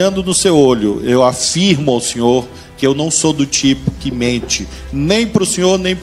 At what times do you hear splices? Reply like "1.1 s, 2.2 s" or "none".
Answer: none